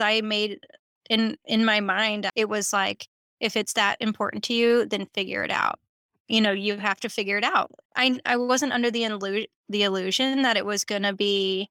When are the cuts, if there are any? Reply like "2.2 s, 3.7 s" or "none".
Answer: 2.3 s, 7.8 s